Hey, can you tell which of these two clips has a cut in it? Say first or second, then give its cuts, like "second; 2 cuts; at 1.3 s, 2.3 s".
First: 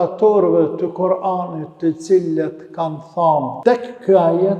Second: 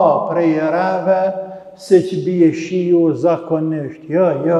first; 1 cut; at 3.5 s